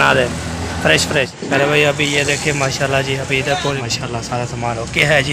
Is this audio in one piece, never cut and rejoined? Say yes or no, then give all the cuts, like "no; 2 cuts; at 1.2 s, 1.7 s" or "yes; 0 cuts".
no; 2 cuts; at 1.4 s, 3.8 s